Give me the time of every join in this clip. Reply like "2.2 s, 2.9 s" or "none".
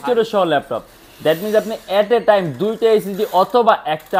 none